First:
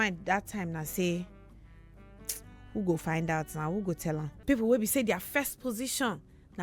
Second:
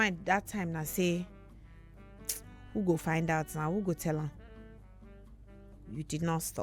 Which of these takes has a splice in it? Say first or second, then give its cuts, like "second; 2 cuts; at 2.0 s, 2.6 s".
first; 1 cut; at 4.3 s